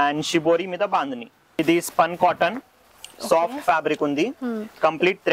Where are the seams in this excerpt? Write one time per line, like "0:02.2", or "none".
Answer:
0:01.6